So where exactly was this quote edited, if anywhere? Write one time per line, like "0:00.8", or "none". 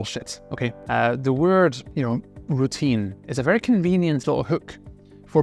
none